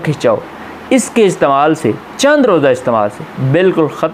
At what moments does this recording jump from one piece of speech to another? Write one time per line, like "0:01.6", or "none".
none